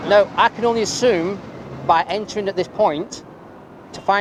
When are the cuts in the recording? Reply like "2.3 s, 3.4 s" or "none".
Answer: none